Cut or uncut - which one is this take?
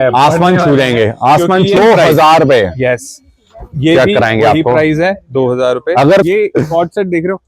cut